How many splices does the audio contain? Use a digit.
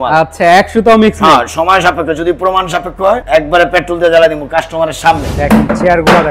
2